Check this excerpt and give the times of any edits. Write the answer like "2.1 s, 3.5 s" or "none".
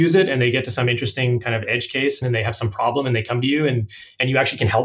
2.2 s